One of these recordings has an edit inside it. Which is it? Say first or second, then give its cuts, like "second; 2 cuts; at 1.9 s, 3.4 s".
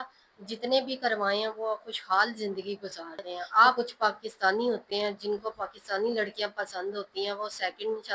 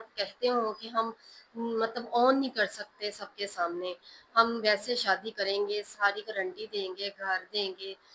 first; 1 cut; at 3.7 s